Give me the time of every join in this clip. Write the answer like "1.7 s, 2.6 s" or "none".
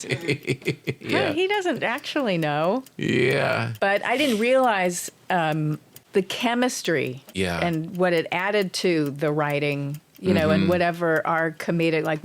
3.7 s, 5.9 s, 7.2 s